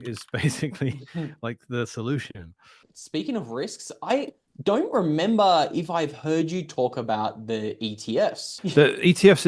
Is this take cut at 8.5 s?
yes; 2 cuts; at 2.9 s, 8.5 s

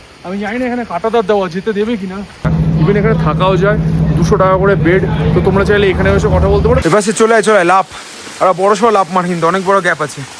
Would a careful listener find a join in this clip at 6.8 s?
yes; 2 cuts; at 2.4 s, 6.8 s

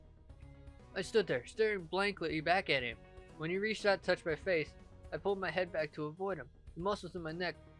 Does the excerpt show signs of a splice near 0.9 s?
yes; 1 cut; at 0.9 s

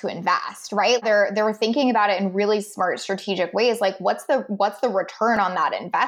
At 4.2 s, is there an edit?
no; 1 cut; at 1.0 s

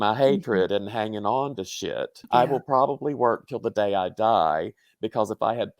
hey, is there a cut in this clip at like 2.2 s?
yes; 1 cut; at 2.2 s

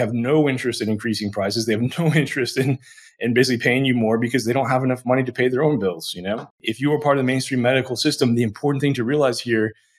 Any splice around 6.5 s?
yes; 1 cut; at 6.5 s

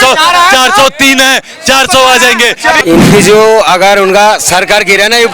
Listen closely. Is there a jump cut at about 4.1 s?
no; 1 cut; at 2.8 s

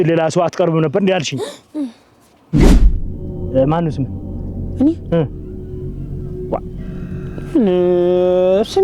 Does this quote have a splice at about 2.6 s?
yes; 1 cut; at 2.6 s

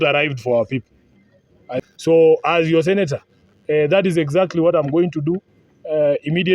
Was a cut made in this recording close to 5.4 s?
no; 1 cut; at 1.8 s

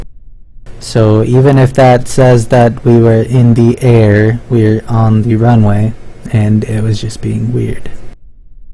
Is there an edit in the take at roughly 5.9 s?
no; 1 cut; at 3.8 s

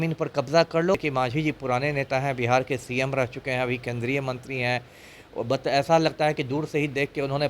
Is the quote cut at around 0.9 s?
yes; 1 cut; at 0.9 s

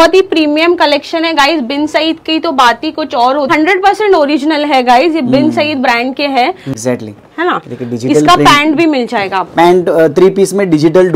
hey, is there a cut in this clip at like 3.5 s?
yes; 2 cuts; at 3.5 s, 6.7 s

